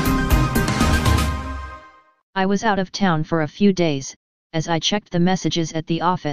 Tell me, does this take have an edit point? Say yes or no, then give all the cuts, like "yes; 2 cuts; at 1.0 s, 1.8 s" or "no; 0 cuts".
no; 0 cuts